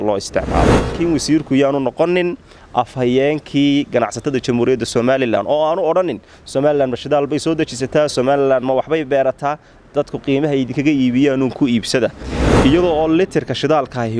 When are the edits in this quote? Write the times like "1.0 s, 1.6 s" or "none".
0.9 s, 12.3 s